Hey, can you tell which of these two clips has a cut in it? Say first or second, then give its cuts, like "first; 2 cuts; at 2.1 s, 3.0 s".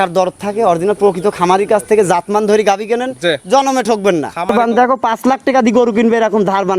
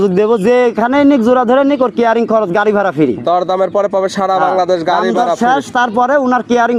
first; 1 cut; at 4.5 s